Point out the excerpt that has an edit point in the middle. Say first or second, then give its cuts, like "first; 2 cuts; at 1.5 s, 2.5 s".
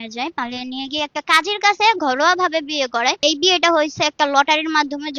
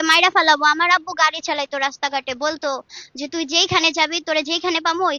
first; 1 cut; at 3.2 s